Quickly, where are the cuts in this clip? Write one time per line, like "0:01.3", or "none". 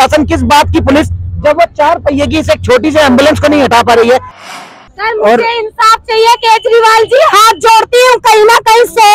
0:04.5